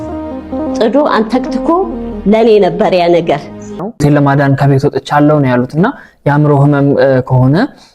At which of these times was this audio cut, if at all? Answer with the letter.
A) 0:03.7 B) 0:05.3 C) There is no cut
A